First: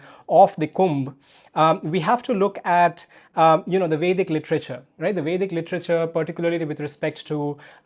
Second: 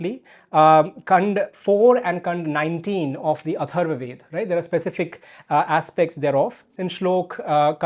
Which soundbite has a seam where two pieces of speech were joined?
second; 1 cut; at 6.7 s

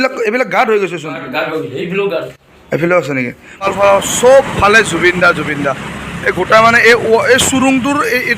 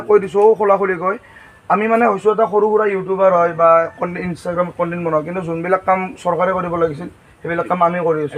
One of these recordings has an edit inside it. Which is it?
first; 1 cut; at 3.7 s

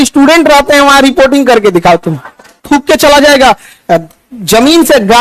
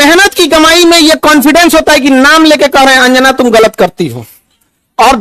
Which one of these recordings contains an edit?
first; 1 cut; at 2.6 s

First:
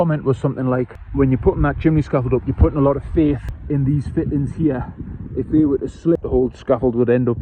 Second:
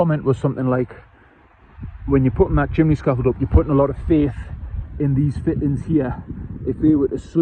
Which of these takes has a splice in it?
first; 3 cuts; at 1.0 s, 3.5 s, 6.1 s

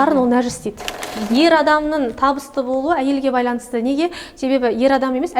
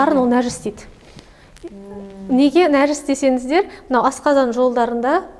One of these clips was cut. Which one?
first; 1 cut; at 1.1 s

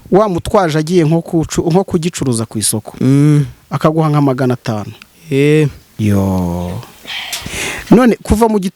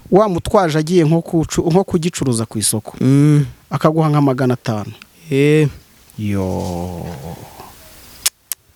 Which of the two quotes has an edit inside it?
first; 1 cut; at 5.8 s

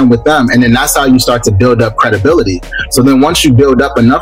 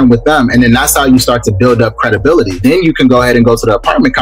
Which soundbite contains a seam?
second; 1 cut; at 2.6 s

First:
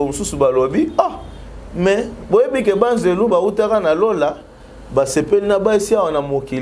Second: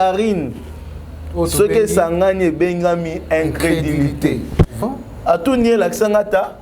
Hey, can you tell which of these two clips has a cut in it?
second; 1 cut; at 4.7 s

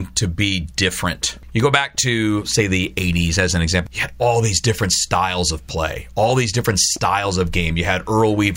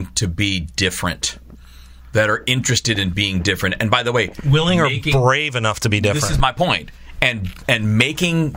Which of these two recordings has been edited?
first; 2 cuts; at 1.3 s, 3.8 s

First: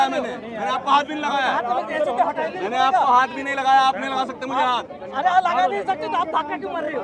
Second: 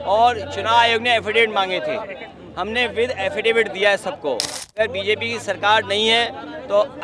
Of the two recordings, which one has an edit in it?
second; 1 cut; at 4.6 s

